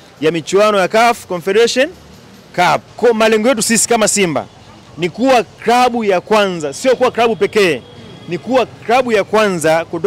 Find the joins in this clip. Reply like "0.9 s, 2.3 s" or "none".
2.9 s